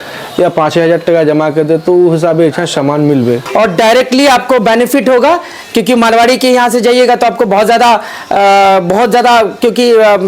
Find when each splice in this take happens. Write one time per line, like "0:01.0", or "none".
0:03.4